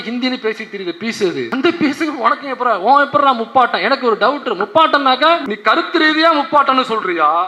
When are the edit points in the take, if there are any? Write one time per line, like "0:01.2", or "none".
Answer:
0:01.5
0:05.5